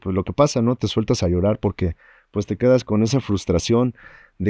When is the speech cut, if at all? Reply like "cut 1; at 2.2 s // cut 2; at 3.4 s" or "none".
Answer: none